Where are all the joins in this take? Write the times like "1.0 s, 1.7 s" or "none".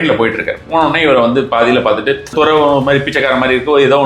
2.3 s